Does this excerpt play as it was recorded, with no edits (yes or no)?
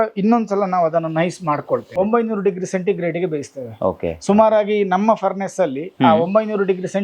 no